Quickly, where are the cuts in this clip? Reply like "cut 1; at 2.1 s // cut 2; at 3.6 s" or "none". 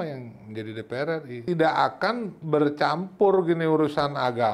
cut 1; at 1.4 s